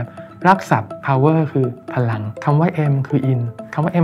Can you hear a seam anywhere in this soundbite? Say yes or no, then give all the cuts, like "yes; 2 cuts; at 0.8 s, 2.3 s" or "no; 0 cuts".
yes; 1 cut; at 2.3 s